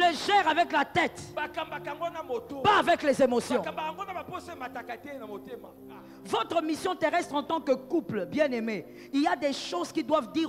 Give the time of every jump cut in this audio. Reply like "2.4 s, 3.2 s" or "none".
6.2 s

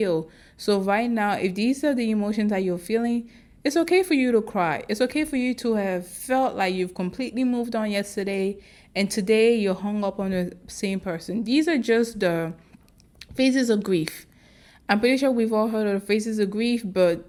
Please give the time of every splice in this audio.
none

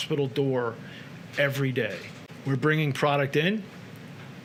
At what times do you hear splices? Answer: none

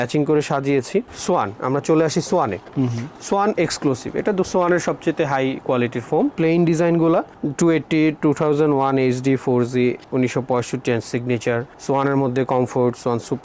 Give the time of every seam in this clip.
1.1 s, 6.3 s

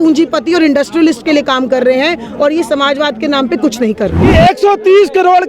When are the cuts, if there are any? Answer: 4.2 s

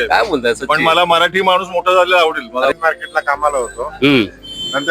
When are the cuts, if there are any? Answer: 2.8 s

